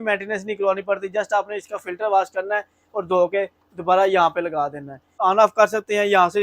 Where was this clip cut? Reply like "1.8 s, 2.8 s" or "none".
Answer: 5.1 s